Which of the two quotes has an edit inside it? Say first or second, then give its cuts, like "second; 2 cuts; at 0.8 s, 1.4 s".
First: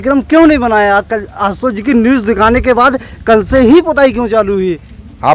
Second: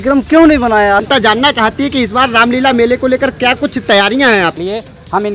second; 2 cuts; at 1.1 s, 4.6 s